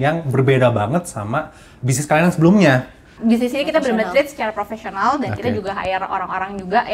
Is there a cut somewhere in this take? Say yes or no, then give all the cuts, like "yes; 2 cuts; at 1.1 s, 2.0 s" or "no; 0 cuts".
yes; 1 cut; at 3.1 s